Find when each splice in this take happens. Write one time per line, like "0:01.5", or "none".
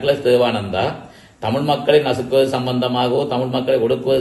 none